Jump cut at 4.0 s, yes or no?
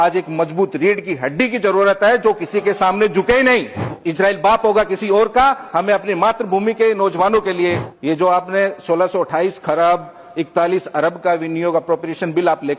yes